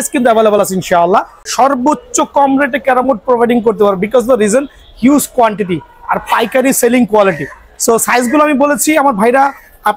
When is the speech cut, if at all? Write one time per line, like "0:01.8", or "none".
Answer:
0:01.4